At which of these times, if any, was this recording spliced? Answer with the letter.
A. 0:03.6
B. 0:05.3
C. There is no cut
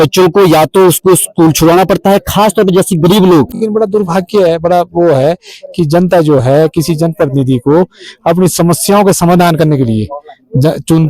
A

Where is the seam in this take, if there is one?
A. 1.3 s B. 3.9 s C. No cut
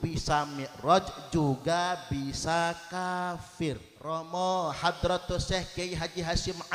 B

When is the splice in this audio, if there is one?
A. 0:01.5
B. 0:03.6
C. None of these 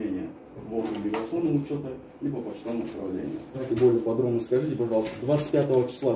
B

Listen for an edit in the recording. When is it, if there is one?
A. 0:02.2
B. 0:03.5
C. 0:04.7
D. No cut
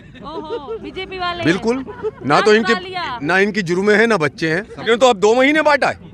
C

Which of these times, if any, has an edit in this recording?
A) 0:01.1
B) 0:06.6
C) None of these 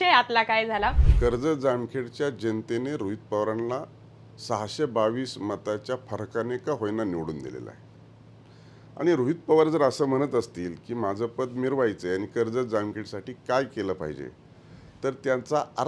A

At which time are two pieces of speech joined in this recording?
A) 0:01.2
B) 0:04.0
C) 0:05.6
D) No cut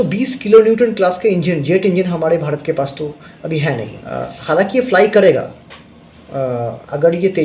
B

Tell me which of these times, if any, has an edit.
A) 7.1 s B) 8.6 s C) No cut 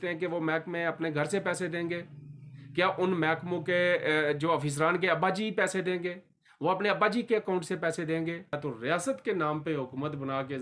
B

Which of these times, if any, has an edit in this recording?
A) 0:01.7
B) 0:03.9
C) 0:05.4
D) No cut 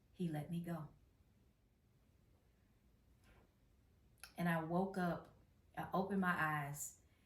A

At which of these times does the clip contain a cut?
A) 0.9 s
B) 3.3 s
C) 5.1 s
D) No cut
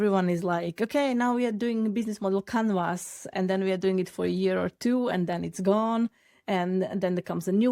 B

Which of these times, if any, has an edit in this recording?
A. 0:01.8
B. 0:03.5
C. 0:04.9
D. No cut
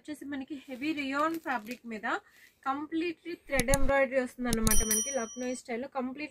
D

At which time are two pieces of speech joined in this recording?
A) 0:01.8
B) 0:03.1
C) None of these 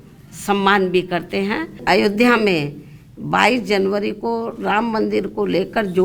A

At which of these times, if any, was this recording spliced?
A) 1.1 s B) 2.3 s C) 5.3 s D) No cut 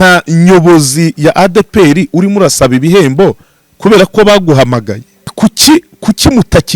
C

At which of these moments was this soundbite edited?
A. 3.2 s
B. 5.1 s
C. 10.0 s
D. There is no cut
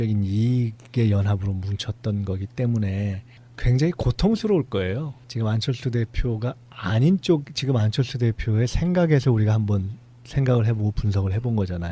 A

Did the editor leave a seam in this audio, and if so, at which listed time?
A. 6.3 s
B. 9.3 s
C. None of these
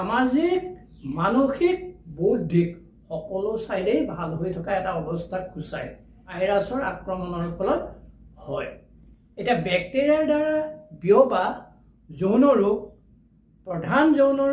A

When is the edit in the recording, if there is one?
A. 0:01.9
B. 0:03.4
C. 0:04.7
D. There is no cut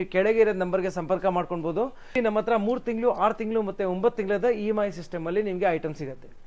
D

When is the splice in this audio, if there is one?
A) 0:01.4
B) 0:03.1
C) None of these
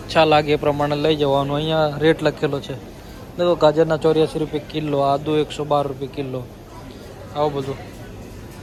C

